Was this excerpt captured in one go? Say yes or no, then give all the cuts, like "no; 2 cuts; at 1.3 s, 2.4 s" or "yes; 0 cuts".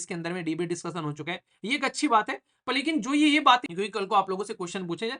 no; 1 cut; at 3.7 s